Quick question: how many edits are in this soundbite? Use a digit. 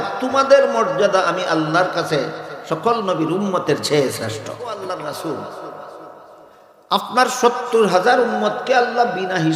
1